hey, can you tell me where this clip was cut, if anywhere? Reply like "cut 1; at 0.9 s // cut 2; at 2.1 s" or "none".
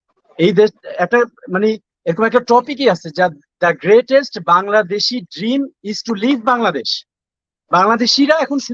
none